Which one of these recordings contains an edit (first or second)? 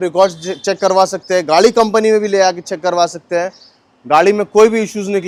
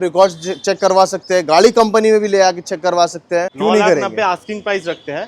second